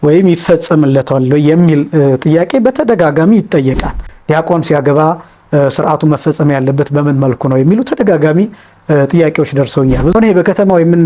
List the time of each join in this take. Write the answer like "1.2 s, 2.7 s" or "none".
4.1 s, 10.1 s

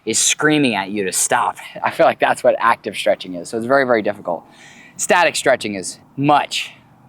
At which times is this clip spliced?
6.0 s

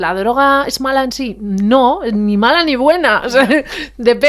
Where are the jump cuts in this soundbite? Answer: none

